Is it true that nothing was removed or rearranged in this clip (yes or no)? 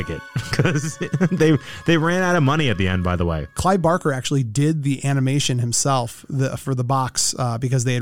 yes